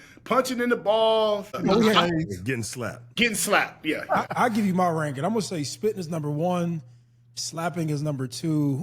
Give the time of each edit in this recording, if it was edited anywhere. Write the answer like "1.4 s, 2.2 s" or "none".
1.6 s, 3.0 s, 4.3 s

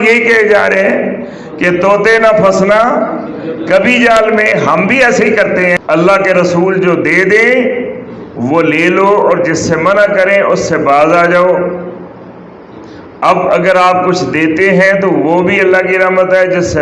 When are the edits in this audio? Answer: 5.8 s

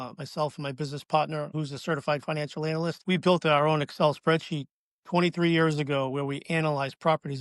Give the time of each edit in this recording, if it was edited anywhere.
1.5 s, 3.0 s

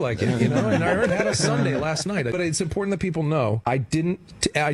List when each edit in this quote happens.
1.1 s, 2.3 s, 3.7 s

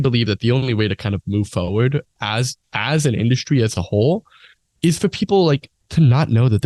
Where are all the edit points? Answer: none

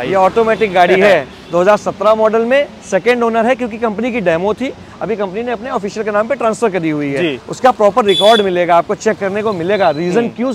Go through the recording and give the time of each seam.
none

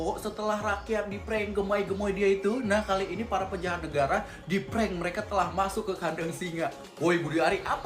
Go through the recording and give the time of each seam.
none

